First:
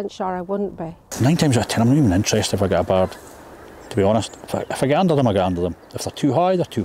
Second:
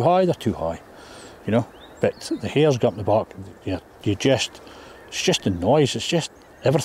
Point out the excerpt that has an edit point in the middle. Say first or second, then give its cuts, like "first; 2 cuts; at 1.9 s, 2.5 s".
first; 1 cut; at 1.0 s